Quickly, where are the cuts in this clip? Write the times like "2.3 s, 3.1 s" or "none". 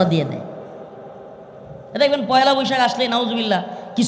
none